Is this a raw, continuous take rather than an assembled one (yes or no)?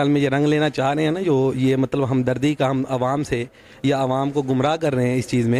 yes